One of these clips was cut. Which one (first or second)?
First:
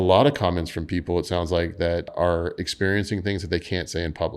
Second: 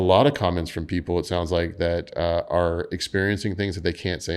first